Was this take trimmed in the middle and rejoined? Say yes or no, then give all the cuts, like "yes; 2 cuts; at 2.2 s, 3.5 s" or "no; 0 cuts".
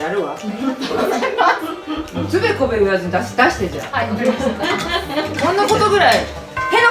yes; 1 cut; at 5.3 s